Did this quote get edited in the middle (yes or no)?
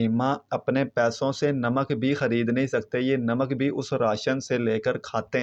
no